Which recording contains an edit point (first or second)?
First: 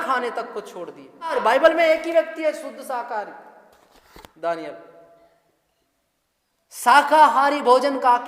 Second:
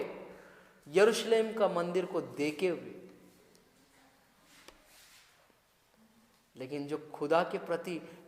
first